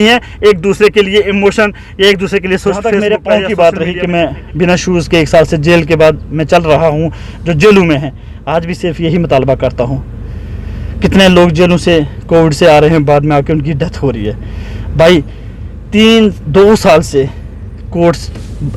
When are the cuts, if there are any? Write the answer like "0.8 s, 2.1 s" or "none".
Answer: 3.0 s